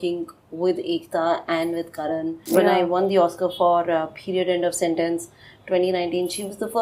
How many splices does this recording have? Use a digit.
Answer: 1